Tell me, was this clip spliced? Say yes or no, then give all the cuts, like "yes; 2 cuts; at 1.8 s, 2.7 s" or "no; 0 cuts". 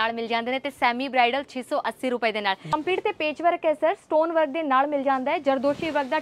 yes; 1 cut; at 2.6 s